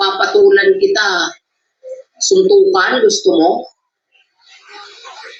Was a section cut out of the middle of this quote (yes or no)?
no